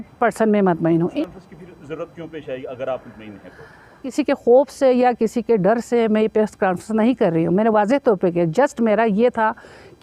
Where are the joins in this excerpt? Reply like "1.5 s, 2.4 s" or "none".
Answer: 1.1 s, 4.1 s